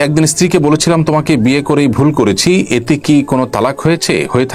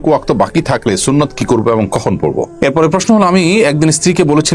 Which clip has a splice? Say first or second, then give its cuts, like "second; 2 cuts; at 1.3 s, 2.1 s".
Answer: second; 1 cut; at 2.5 s